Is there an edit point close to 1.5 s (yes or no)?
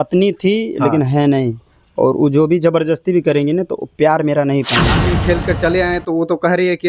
no